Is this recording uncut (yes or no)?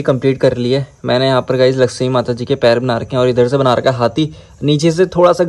yes